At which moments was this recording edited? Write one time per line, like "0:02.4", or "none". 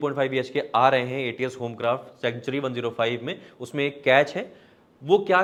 none